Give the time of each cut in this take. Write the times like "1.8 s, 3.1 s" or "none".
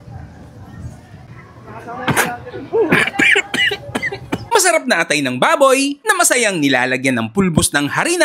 1.2 s